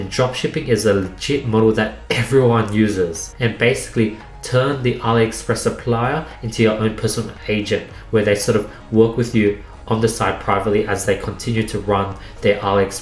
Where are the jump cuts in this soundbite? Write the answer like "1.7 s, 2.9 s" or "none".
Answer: 3.3 s